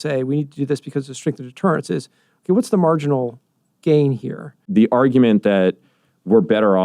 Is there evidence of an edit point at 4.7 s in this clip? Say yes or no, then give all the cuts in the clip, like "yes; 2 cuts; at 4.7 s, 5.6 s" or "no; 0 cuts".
yes; 1 cut; at 4.7 s